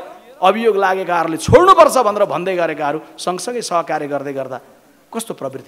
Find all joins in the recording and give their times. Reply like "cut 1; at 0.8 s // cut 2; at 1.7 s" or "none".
none